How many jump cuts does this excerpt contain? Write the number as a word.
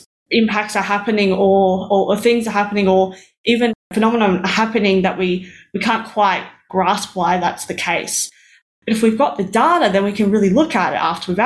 one